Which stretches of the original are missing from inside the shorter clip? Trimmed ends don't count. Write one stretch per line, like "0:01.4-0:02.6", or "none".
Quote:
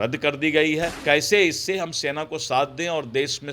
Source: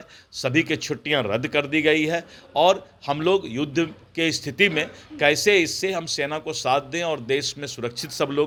0:02.3-0:05.1